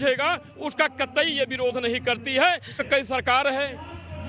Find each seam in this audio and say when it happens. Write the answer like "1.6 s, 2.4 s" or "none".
2.9 s